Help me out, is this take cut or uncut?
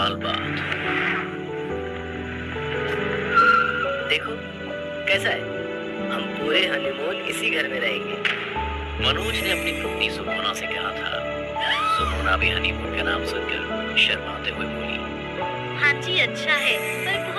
uncut